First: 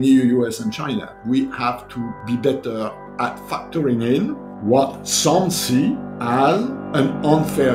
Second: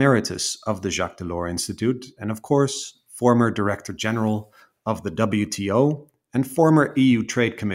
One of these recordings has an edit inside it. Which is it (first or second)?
first